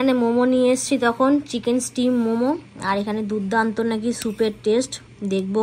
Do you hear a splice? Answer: no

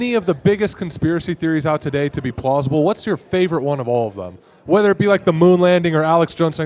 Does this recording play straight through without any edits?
yes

